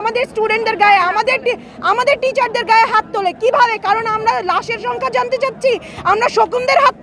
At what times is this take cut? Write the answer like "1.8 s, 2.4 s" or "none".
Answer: none